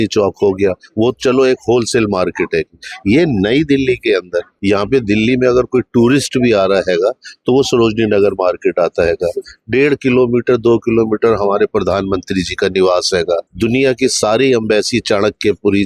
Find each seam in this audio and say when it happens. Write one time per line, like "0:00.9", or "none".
0:04.4
0:13.5